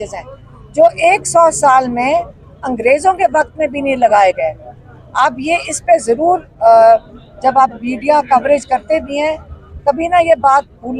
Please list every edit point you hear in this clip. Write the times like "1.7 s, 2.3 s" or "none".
none